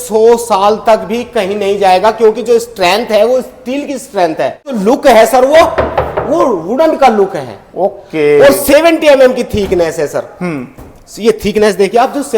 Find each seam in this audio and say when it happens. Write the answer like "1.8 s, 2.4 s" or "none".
4.7 s